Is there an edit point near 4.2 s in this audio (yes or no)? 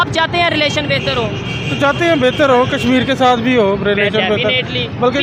no